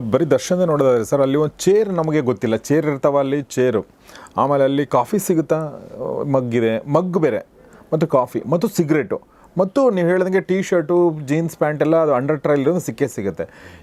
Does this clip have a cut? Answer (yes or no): no